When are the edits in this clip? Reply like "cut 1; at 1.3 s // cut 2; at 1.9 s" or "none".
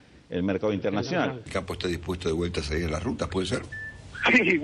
cut 1; at 1.4 s